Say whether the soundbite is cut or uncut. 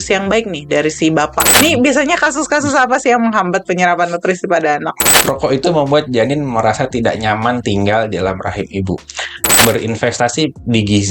cut